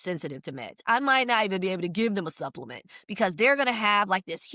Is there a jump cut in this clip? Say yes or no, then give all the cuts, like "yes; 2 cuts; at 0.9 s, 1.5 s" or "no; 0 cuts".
no; 0 cuts